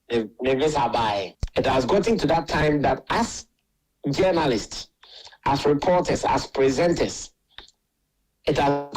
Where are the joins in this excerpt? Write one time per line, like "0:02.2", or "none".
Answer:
0:01.4

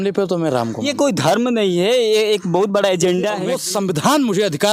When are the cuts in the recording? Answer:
0:03.5

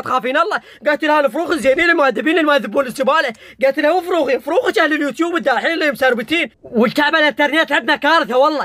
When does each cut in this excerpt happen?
0:06.6

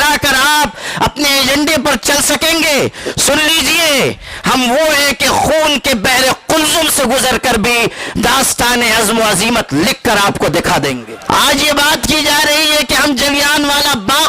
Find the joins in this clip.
0:11.1

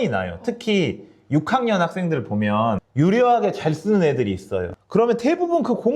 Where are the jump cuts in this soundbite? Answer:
none

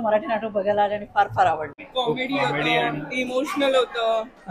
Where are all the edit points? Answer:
0:01.8

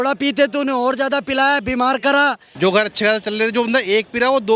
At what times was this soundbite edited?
0:02.5

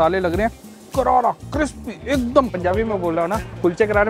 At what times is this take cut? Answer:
0:02.5

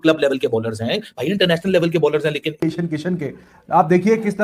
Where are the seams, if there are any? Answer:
0:02.5

